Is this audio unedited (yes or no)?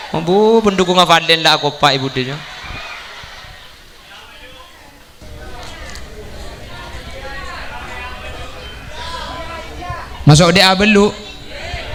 yes